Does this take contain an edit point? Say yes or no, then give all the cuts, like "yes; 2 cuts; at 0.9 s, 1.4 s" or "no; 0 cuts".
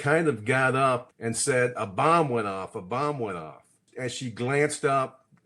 yes; 2 cuts; at 1.1 s, 3.9 s